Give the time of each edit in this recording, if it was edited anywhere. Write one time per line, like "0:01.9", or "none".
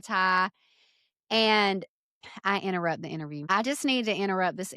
0:03.5